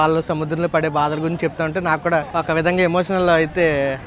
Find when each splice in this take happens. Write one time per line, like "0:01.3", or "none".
0:02.3